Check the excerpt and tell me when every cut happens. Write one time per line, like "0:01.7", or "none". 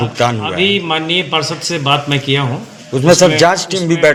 none